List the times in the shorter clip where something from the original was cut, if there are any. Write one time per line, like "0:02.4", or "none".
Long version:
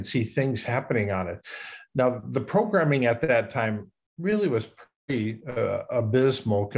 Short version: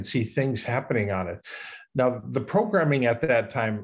none